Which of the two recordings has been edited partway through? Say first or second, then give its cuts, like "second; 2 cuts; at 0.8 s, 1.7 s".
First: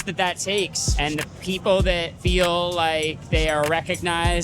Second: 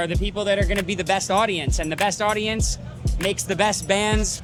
first; 2 cuts; at 0.9 s, 2.1 s